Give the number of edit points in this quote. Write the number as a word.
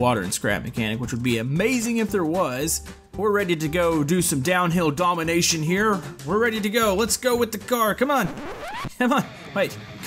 one